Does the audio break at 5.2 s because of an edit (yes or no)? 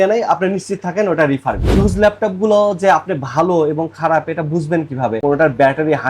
yes